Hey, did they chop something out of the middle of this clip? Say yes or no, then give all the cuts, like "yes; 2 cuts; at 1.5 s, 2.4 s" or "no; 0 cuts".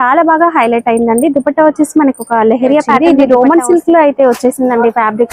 yes; 1 cut; at 2.9 s